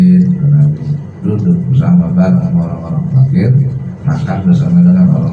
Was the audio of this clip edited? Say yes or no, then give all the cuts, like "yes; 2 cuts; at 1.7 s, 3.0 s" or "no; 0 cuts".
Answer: yes; 1 cut; at 3.9 s